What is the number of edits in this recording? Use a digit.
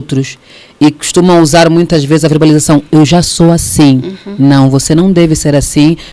0